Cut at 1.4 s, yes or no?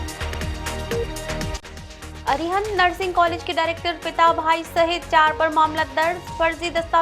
yes